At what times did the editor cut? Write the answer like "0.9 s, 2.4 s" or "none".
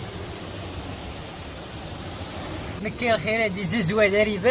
2.7 s